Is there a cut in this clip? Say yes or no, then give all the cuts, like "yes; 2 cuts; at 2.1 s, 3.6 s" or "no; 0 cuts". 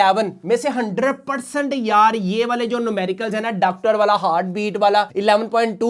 no; 0 cuts